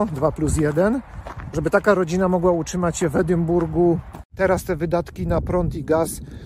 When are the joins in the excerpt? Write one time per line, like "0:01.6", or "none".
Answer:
0:04.3